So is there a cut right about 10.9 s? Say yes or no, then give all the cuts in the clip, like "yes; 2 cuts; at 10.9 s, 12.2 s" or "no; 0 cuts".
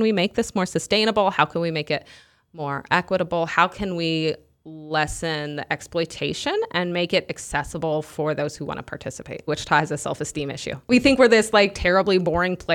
yes; 2 cuts; at 9.5 s, 10.9 s